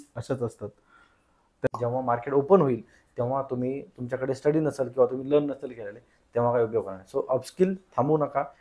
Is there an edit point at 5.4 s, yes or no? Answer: no